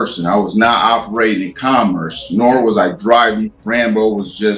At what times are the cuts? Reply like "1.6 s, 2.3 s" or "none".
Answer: 3.6 s